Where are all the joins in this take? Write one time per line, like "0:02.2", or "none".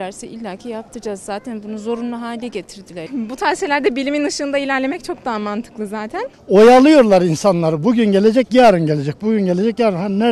0:03.0
0:06.3